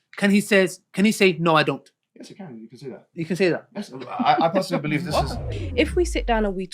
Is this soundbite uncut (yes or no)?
no